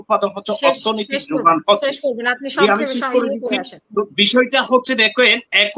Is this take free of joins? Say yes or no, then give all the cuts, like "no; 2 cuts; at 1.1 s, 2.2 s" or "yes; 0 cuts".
yes; 0 cuts